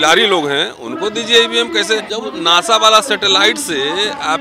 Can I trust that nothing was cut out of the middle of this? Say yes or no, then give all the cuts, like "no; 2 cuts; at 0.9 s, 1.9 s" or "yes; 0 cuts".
no; 1 cut; at 2.1 s